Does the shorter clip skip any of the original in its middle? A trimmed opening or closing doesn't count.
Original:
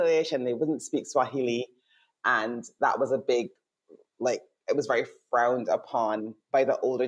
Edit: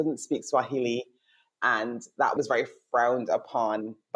yes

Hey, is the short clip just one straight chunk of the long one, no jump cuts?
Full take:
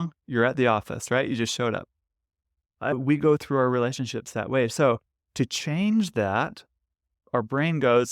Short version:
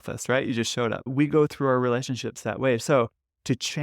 no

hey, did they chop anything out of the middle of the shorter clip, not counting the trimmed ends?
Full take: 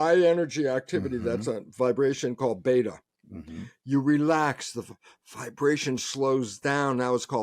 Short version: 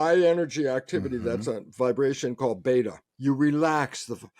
yes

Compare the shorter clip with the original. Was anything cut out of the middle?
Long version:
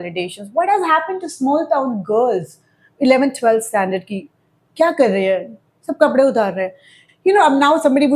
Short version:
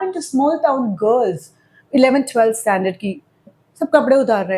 yes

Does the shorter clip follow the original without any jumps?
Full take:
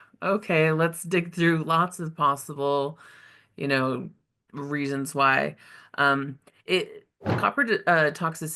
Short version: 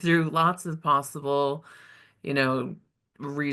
yes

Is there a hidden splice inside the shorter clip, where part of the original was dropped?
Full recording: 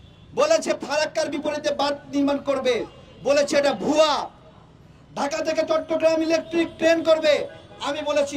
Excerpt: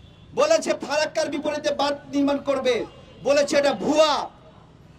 no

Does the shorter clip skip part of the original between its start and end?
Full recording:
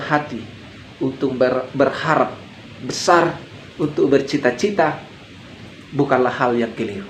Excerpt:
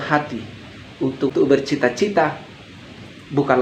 yes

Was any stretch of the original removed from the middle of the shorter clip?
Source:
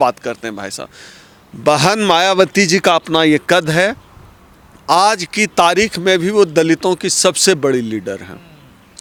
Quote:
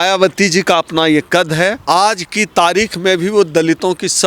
yes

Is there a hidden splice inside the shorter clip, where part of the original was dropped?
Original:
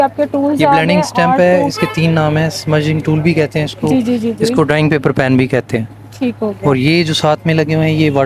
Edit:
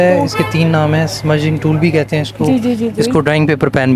no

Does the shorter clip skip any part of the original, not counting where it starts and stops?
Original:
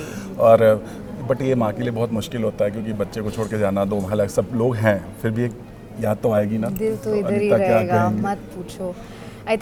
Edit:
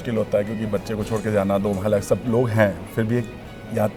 no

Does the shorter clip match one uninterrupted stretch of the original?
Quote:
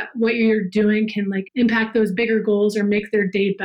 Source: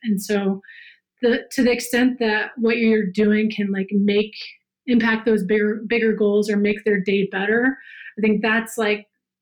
no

